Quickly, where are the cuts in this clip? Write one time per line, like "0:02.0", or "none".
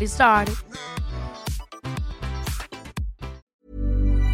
0:03.4